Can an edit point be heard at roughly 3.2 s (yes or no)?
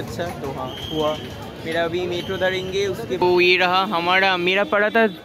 yes